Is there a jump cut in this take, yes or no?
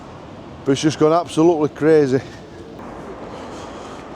yes